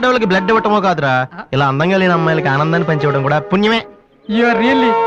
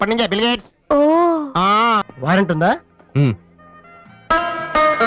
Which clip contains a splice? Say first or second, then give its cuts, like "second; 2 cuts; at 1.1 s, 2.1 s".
second; 1 cut; at 2.1 s